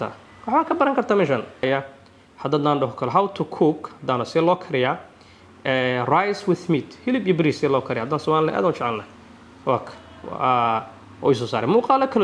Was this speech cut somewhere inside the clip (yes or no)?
yes